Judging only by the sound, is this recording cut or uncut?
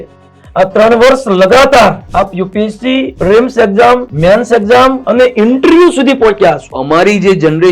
cut